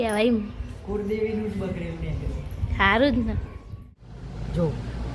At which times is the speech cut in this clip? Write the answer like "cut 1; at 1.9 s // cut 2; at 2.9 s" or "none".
cut 1; at 3.7 s